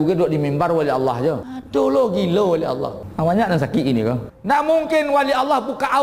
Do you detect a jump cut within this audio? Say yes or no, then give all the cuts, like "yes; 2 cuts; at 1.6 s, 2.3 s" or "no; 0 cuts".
yes; 3 cuts; at 1.5 s, 3.0 s, 4.3 s